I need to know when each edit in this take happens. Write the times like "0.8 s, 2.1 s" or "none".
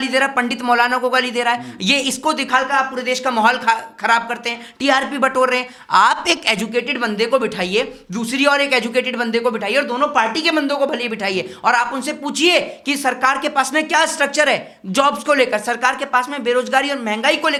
none